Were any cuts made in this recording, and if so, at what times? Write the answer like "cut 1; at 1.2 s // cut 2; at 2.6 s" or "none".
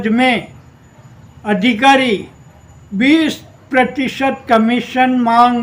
none